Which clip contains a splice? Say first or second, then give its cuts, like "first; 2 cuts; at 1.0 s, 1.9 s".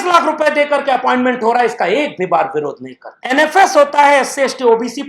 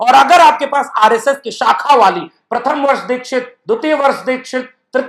first; 1 cut; at 3.3 s